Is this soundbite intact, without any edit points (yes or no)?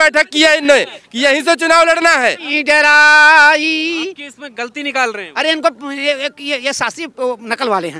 no